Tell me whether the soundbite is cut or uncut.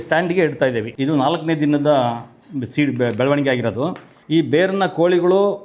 cut